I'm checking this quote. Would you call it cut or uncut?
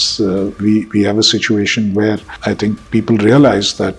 cut